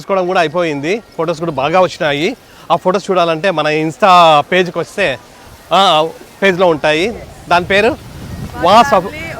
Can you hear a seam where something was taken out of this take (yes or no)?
no